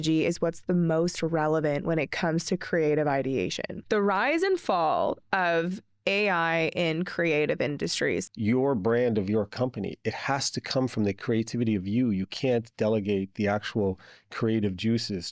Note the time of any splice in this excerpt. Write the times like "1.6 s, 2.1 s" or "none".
3.7 s, 8.2 s